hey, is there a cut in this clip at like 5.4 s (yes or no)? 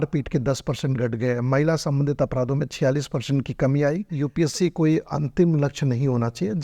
no